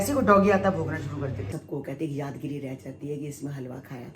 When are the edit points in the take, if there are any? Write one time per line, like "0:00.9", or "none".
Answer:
0:01.4